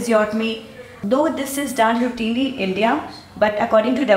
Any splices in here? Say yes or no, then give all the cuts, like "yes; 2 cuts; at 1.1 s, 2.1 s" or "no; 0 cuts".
yes; 1 cut; at 0.9 s